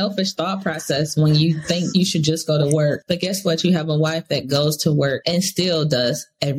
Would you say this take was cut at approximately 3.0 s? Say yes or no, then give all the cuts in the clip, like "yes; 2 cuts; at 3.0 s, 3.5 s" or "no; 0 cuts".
yes; 3 cuts; at 1.9 s, 3.0 s, 5.2 s